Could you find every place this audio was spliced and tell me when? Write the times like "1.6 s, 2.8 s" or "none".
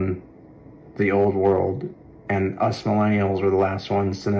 none